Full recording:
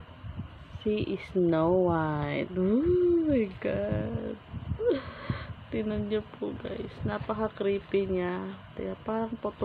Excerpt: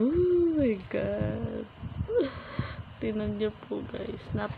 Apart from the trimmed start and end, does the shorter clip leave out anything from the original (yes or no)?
no